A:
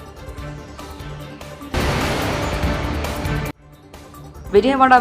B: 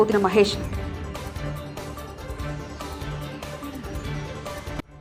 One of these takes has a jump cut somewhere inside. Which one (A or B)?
A